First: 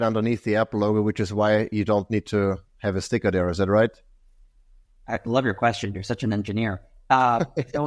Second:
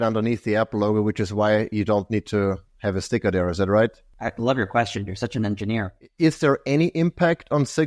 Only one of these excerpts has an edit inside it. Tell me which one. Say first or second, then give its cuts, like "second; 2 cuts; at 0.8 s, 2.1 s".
second; 2 cuts; at 4.1 s, 6.0 s